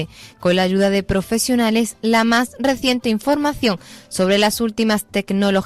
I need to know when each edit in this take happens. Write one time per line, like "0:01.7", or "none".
none